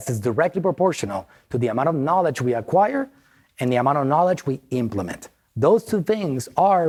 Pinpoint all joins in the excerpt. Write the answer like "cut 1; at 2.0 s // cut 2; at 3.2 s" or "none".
none